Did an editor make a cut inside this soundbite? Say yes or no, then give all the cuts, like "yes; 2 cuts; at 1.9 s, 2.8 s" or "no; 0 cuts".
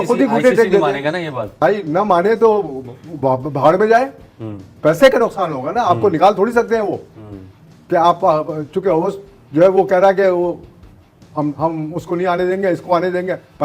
no; 0 cuts